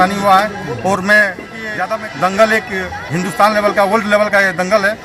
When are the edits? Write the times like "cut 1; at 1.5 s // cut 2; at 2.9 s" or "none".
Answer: cut 1; at 1.6 s